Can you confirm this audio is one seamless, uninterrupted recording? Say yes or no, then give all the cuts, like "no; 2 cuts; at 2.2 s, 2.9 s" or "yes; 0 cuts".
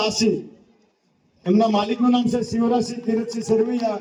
yes; 0 cuts